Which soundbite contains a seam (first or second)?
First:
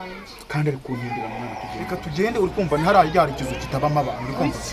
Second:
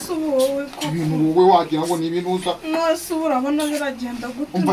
first